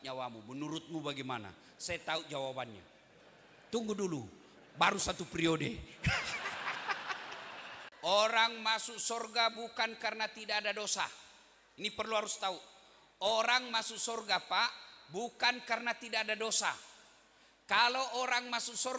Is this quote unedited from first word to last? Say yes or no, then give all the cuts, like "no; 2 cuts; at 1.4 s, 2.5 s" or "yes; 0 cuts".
no; 1 cut; at 7.8 s